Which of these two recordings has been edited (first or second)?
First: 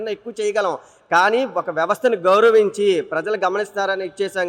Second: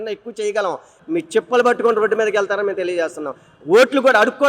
second